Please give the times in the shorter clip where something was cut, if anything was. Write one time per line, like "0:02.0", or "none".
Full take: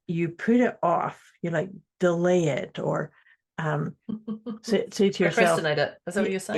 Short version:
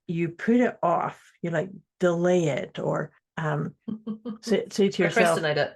0:03.2